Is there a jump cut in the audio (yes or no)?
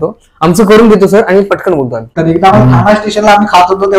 yes